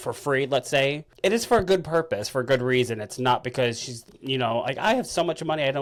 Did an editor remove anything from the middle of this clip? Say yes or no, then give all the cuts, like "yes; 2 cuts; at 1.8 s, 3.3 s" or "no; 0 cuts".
no; 0 cuts